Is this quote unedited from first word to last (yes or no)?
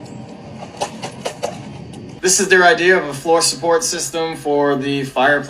no